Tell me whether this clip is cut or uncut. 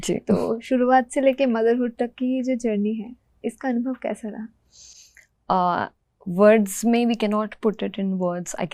uncut